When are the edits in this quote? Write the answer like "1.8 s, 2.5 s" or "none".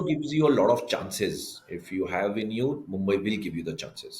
none